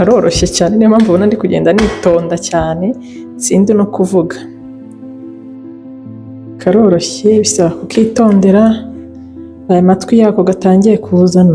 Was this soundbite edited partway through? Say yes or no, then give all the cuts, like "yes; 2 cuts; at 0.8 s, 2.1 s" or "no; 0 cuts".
yes; 2 cuts; at 4.4 s, 6.6 s